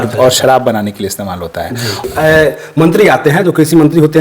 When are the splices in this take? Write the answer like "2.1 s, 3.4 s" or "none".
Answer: 2.0 s